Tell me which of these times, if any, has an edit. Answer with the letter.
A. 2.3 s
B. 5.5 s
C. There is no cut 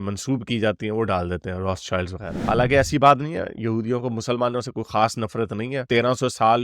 A